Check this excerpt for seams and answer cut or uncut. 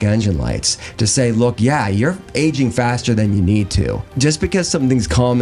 cut